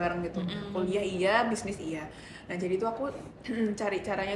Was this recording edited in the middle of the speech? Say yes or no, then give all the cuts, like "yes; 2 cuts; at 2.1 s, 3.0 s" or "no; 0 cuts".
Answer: no; 0 cuts